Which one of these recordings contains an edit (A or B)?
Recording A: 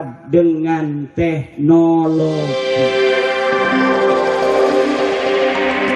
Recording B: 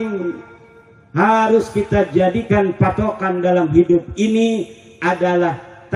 A